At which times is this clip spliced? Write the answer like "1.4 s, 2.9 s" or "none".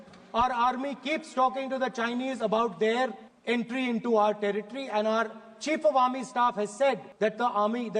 3.3 s, 7.1 s